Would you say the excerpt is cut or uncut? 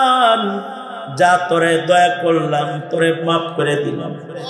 uncut